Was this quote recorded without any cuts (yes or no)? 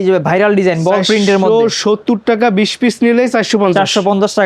yes